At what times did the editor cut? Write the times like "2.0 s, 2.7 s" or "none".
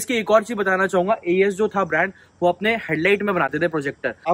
none